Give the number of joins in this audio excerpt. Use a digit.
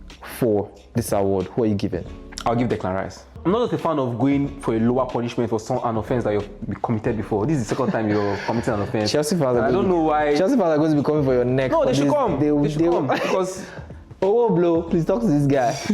1